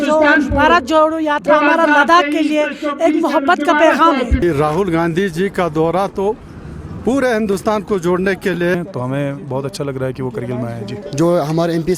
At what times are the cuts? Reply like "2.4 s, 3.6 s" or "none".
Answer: 4.4 s, 8.7 s, 11.0 s